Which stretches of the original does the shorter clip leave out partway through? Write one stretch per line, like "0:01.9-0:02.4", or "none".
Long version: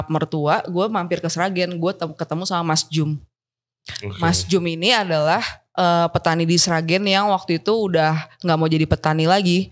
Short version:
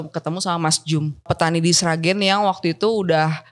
0:03.3-0:06.1